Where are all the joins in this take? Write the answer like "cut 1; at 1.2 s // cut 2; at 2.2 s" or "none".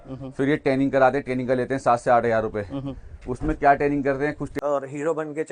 cut 1; at 4.5 s